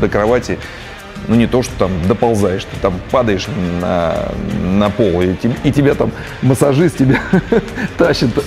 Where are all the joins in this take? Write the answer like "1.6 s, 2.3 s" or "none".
none

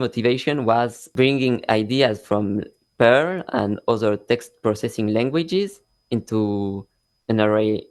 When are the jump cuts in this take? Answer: 1.0 s

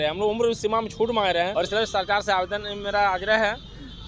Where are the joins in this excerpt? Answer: 1.5 s

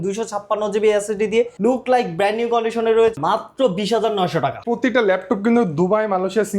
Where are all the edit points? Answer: 1.5 s, 3.2 s, 4.6 s

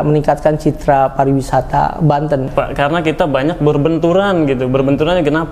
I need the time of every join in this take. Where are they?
2.5 s

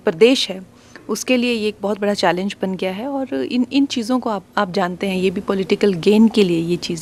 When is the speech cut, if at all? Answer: none

